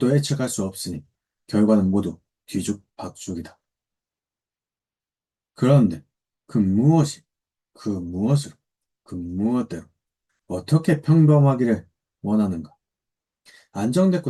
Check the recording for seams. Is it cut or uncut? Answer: uncut